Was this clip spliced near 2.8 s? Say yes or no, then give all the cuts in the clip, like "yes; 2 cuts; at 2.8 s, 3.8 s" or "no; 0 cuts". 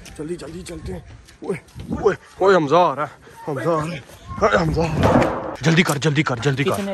no; 1 cut; at 5.5 s